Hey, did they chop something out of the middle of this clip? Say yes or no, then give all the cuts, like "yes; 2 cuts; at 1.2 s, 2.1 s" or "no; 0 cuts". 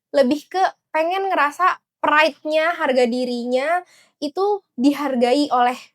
no; 0 cuts